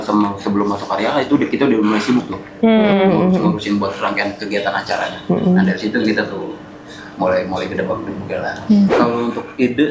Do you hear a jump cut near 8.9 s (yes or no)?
yes